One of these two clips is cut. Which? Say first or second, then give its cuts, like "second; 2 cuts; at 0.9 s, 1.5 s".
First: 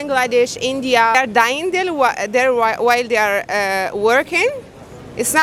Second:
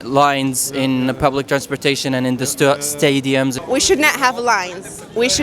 second; 1 cut; at 3.6 s